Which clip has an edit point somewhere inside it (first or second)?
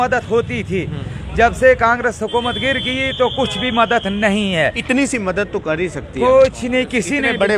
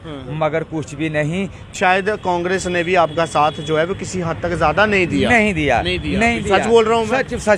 second